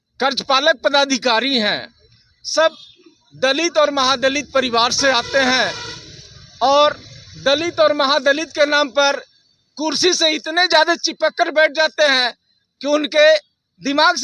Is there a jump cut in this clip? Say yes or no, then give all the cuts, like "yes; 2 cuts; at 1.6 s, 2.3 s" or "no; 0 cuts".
no; 0 cuts